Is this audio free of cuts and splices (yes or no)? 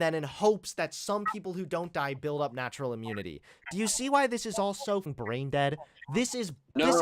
no